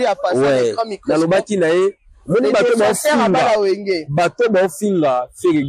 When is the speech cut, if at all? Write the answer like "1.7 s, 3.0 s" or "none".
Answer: none

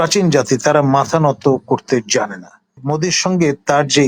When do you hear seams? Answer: 2.8 s

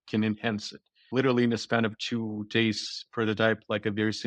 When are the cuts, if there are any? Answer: 1.1 s

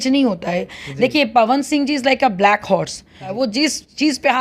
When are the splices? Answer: 3.3 s

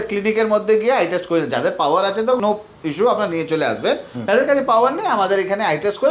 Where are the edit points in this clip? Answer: none

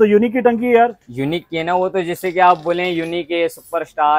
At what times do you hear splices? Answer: none

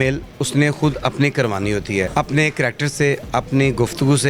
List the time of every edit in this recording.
2.1 s

